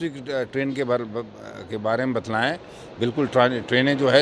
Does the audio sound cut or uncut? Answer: uncut